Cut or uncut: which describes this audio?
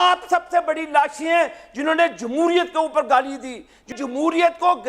cut